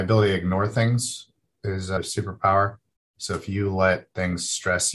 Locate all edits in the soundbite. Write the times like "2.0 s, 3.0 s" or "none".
2.0 s